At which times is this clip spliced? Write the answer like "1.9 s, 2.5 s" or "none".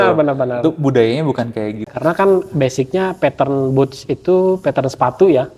1.9 s